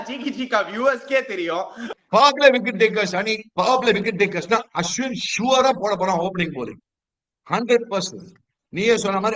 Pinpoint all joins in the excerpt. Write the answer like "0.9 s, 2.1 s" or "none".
1.8 s